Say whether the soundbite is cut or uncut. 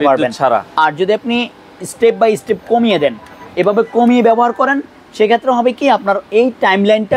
uncut